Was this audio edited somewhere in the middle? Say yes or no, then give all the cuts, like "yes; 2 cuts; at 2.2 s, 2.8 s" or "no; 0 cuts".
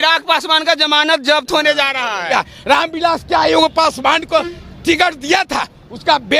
yes; 1 cut; at 2.3 s